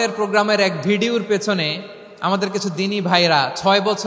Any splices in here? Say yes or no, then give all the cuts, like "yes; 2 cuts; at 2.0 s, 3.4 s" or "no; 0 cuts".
no; 0 cuts